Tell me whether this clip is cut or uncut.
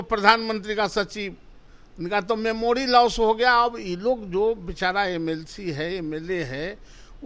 uncut